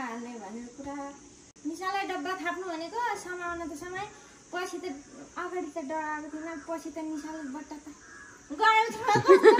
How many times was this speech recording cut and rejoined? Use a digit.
0